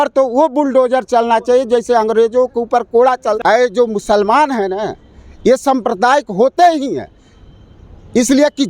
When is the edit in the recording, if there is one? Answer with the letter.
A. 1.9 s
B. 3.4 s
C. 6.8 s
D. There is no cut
B